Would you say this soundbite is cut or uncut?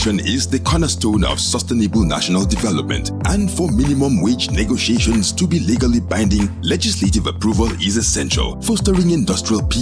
uncut